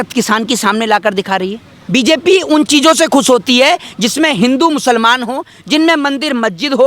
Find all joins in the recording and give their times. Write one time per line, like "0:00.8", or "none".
0:01.7